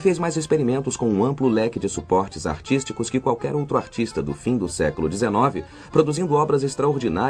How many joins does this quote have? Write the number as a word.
one